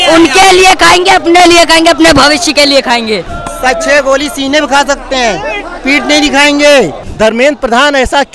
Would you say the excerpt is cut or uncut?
cut